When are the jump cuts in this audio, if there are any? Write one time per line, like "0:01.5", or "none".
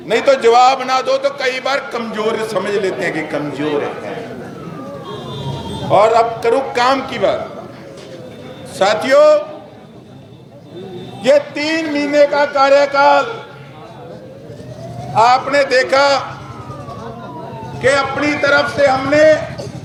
none